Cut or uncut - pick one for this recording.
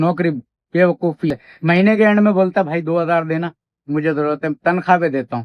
cut